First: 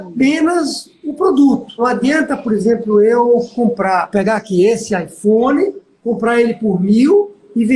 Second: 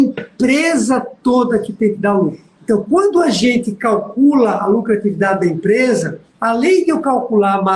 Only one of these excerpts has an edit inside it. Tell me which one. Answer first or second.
first